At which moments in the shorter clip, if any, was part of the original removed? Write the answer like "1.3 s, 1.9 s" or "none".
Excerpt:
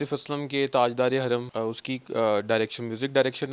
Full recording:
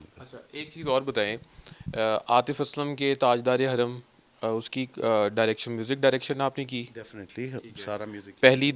1.5 s